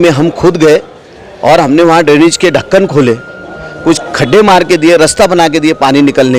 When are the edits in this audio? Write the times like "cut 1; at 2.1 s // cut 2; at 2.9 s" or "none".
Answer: none